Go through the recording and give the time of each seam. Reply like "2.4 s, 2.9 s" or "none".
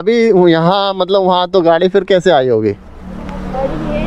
none

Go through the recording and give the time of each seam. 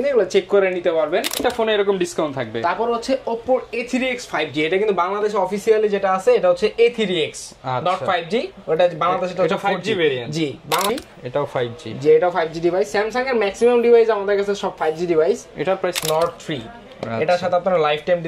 1.4 s, 10.9 s, 16.0 s

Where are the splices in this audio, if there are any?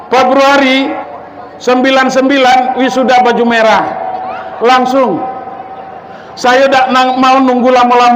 1.1 s

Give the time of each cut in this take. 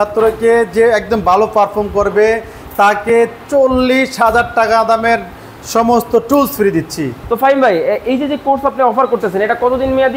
7.2 s

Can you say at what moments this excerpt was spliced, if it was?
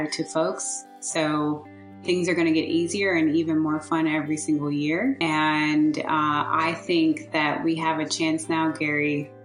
5.2 s

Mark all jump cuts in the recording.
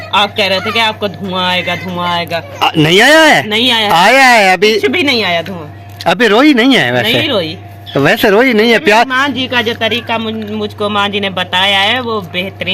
none

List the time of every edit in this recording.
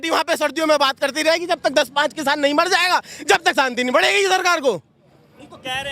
none

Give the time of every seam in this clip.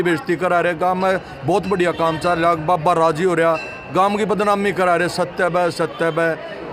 none

